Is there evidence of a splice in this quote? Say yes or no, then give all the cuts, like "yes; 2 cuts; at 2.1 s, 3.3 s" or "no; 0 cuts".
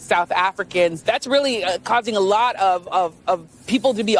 yes; 1 cut; at 1.0 s